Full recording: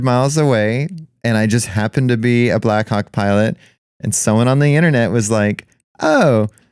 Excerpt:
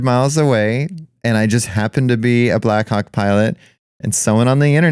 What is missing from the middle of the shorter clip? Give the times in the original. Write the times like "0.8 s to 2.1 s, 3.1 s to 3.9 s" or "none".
none